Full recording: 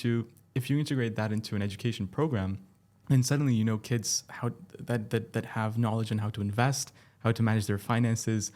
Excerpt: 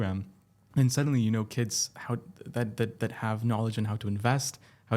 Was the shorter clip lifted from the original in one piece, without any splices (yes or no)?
yes